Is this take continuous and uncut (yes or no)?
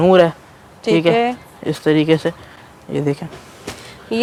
yes